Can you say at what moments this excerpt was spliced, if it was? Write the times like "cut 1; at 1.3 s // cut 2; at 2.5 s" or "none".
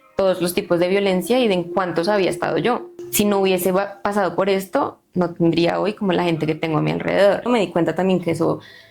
cut 1; at 3.0 s // cut 2; at 7.5 s